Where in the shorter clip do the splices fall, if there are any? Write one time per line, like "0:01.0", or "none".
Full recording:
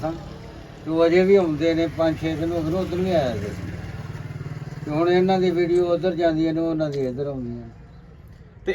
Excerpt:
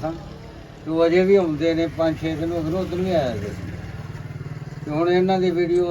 none